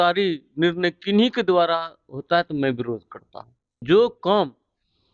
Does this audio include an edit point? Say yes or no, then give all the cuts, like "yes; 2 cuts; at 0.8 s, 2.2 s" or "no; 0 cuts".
yes; 1 cut; at 3.8 s